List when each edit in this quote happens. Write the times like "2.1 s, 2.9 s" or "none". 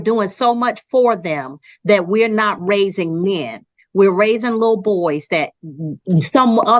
none